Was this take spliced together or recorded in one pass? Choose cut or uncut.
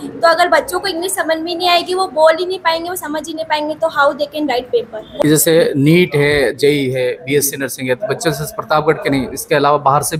cut